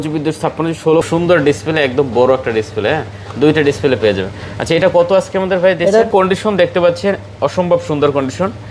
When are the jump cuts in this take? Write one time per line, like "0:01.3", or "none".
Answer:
0:01.0
0:06.1